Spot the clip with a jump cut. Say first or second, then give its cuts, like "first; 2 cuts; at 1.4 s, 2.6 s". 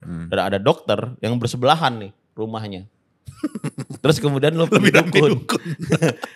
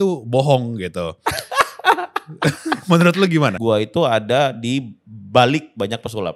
second; 1 cut; at 3.6 s